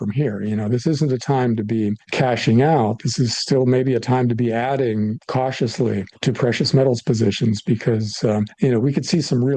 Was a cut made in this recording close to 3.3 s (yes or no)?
no